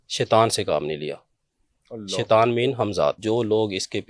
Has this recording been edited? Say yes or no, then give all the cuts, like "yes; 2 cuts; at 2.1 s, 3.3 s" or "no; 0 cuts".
yes; 1 cut; at 3.2 s